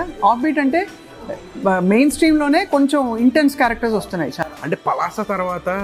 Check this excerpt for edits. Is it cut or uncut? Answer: uncut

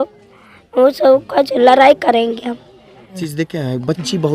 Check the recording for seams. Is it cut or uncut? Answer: cut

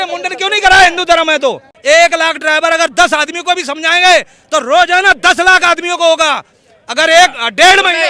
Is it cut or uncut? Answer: cut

